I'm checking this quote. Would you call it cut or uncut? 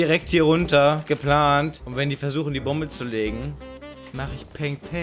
cut